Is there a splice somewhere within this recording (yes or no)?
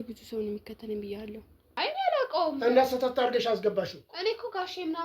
yes